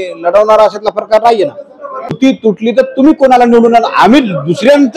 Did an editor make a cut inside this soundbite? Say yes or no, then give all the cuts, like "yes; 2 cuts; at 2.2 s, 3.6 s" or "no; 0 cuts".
yes; 1 cut; at 2.2 s